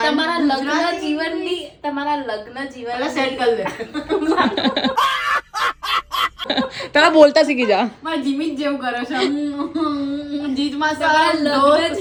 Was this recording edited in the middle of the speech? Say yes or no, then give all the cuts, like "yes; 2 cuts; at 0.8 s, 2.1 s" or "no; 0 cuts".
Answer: no; 0 cuts